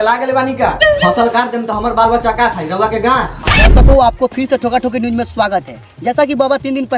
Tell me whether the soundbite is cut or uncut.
cut